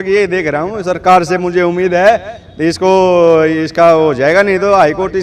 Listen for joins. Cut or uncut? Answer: uncut